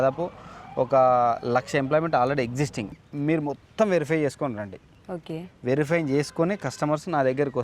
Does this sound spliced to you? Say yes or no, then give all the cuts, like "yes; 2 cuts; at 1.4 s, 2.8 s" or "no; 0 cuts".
yes; 1 cut; at 2.9 s